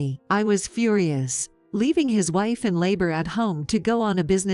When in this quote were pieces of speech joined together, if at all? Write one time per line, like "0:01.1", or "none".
none